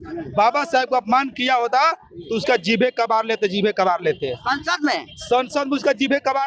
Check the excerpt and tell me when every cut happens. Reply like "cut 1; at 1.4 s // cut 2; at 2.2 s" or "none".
none